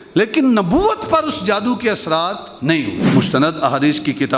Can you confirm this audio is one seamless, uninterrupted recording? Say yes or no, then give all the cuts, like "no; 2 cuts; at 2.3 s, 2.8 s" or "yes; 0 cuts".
no; 1 cut; at 3.0 s